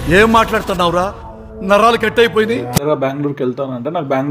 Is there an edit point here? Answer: yes; 1 cut; at 2.8 s

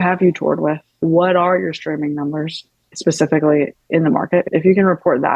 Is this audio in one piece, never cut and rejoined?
no; 2 cuts; at 1.0 s, 4.5 s

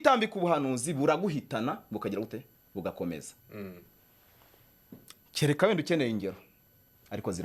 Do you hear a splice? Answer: no; 0 cuts

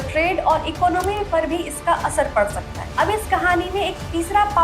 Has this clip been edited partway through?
yes; 1 cut; at 2.9 s

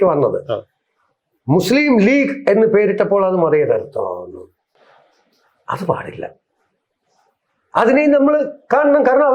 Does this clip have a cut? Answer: no; 0 cuts

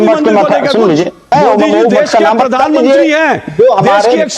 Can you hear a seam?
yes; 1 cut; at 1.3 s

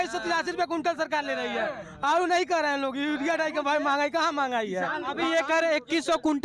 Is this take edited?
no; 0 cuts

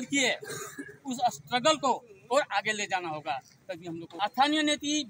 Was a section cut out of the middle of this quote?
yes; 1 cut; at 4.1 s

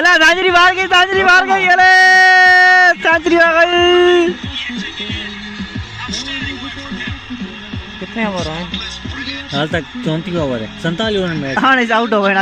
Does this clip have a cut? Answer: no; 0 cuts

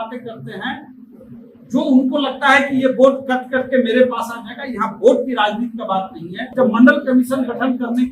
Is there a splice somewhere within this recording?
yes; 1 cut; at 6.5 s

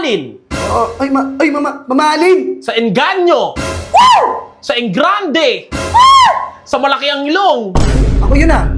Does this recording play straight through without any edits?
yes; 0 cuts

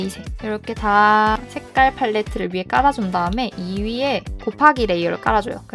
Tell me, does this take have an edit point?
no; 0 cuts

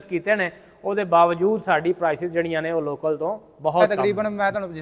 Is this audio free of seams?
no; 1 cut; at 3.8 s

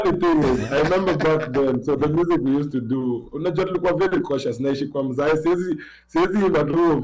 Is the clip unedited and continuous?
yes; 0 cuts

